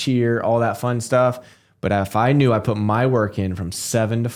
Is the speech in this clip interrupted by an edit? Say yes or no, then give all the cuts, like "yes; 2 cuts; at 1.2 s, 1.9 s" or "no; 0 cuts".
no; 0 cuts